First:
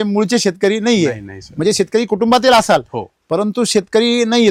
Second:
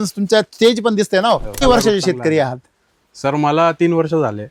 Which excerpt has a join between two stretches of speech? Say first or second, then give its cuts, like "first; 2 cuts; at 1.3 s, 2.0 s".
second; 1 cut; at 1.6 s